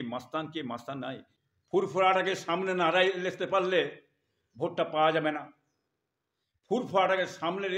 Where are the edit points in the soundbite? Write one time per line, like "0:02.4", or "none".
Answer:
0:01.3